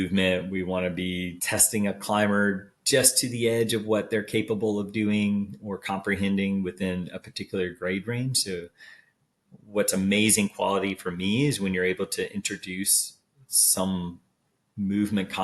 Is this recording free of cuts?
no; 1 cut; at 1.4 s

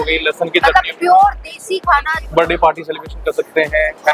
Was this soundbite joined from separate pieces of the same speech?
yes; 1 cut; at 2.2 s

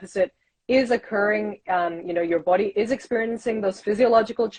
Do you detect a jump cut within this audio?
no; 0 cuts

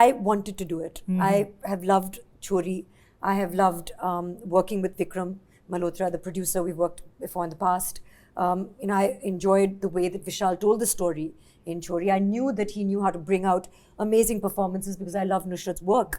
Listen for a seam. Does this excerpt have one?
no; 0 cuts

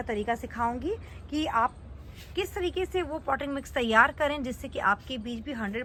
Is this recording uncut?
yes; 0 cuts

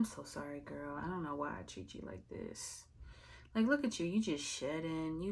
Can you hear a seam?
no; 0 cuts

